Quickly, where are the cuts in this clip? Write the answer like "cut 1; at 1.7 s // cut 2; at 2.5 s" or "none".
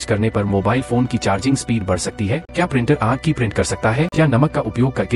cut 1; at 2.4 s // cut 2; at 4.1 s